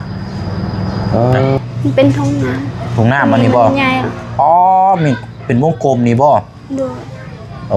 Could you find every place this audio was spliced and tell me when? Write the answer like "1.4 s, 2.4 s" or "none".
1.6 s